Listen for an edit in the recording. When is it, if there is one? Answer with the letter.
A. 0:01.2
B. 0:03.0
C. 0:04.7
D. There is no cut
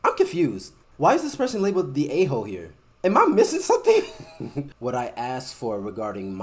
C